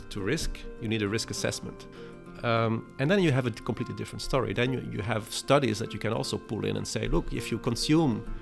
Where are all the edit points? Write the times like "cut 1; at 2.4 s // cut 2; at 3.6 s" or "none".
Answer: cut 1; at 1.9 s